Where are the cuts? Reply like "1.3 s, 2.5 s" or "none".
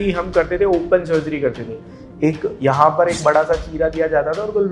none